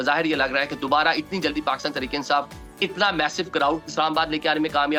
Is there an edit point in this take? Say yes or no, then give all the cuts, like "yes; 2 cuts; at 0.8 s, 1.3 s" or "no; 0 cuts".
no; 0 cuts